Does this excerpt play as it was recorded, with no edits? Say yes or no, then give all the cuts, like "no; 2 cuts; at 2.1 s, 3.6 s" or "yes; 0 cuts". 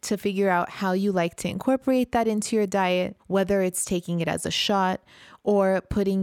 yes; 0 cuts